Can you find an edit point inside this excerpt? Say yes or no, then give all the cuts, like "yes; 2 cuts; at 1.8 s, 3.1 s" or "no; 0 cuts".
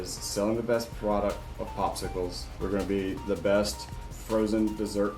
yes; 1 cut; at 2.4 s